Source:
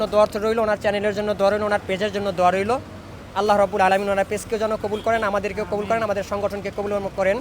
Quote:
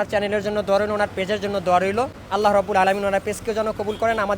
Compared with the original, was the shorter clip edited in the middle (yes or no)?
yes